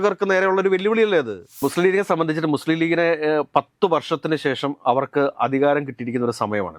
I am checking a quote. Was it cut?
yes; 1 cut; at 1.6 s

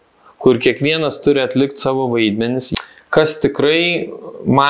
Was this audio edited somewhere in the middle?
yes; 1 cut; at 2.7 s

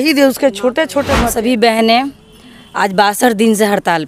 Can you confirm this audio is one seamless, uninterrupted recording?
no; 1 cut; at 1.2 s

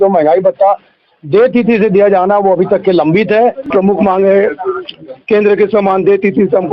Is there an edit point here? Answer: yes; 1 cut; at 3.7 s

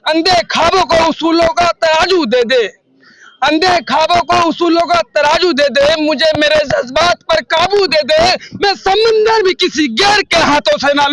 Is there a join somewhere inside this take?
no; 0 cuts

